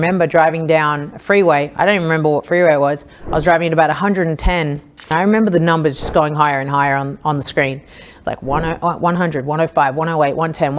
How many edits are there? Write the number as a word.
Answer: one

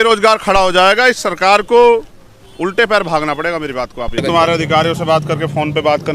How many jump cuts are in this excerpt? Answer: one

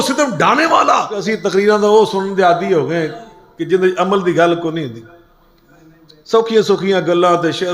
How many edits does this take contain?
one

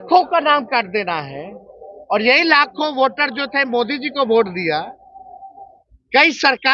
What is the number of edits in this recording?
zero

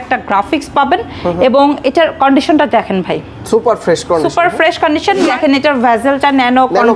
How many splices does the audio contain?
one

